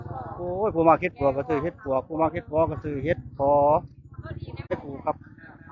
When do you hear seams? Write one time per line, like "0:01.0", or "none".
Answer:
0:04.7